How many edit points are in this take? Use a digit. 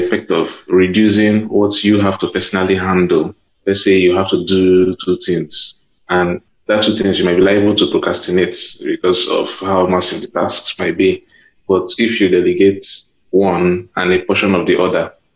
2